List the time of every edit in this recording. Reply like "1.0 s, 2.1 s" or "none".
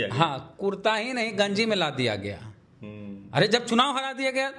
none